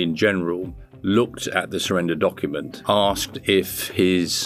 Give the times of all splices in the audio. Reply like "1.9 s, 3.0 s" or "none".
2.7 s